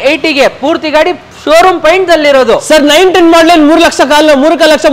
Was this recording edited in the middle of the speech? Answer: no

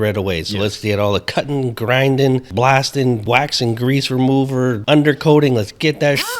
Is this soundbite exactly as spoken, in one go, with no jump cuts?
no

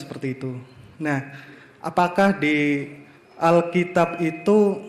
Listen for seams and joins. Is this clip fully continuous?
yes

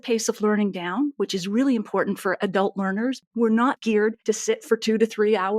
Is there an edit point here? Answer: yes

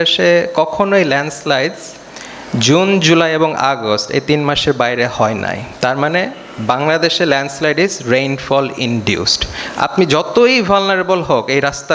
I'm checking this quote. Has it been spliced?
no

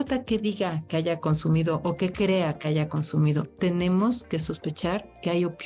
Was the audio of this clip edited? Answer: no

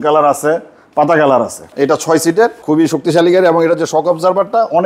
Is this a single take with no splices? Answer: no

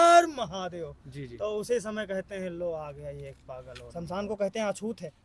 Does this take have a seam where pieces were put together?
yes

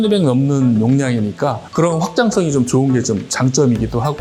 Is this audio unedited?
yes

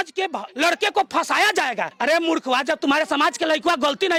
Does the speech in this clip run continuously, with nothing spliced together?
yes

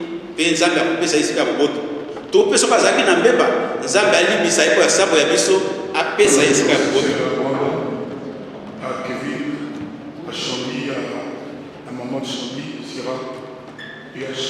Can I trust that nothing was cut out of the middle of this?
no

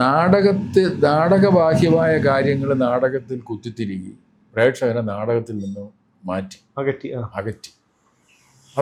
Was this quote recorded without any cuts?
yes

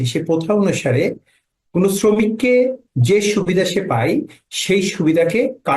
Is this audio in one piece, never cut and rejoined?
yes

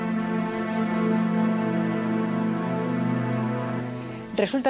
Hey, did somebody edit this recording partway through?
no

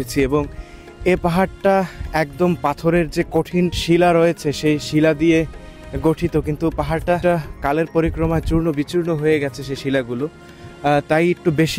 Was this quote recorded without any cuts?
no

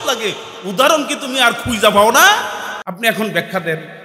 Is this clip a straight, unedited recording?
no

